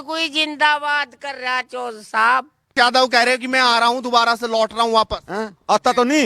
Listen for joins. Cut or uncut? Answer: cut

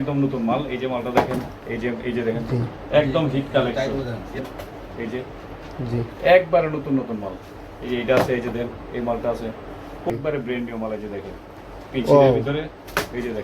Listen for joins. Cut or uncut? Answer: cut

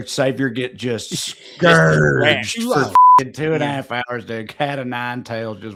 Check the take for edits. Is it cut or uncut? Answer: uncut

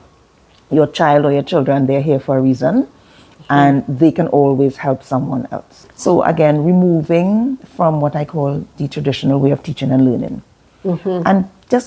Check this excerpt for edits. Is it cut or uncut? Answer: cut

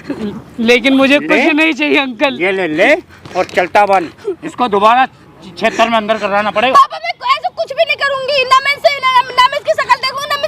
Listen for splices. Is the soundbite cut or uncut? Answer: cut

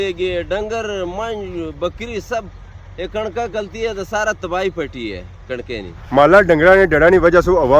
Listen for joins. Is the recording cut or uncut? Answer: cut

